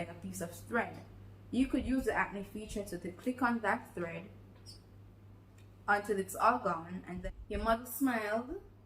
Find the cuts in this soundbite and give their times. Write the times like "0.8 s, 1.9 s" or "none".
7.1 s